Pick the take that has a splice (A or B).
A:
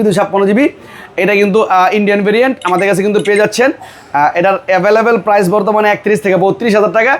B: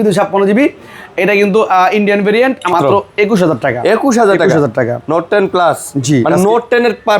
B